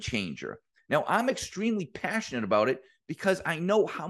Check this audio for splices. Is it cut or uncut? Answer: uncut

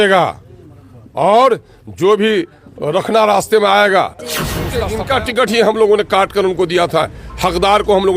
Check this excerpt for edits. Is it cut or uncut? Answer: cut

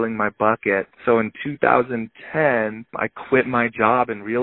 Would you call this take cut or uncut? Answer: cut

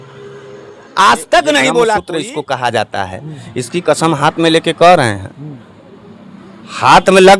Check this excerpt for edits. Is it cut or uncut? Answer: cut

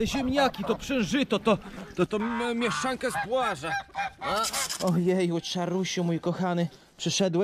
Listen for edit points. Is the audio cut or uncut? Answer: cut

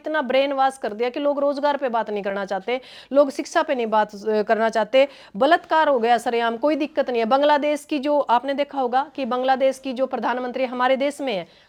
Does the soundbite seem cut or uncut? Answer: uncut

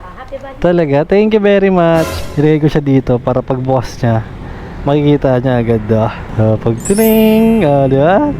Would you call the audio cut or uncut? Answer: cut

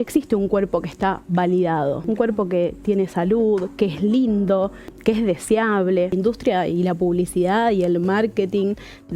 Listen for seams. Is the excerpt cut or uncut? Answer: cut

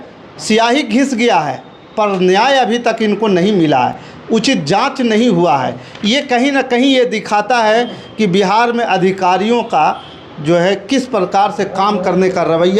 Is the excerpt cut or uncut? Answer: uncut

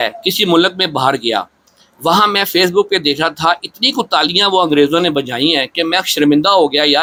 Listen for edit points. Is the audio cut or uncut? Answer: uncut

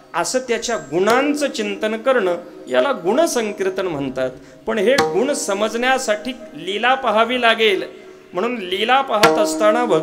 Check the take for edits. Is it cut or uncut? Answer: uncut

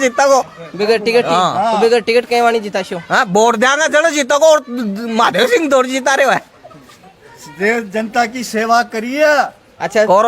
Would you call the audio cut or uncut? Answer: cut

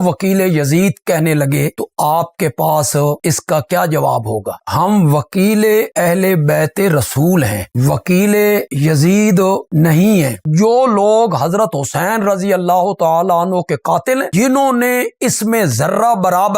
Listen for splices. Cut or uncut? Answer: cut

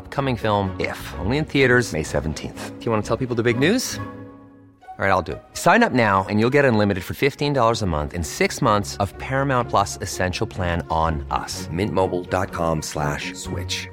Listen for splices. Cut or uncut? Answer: uncut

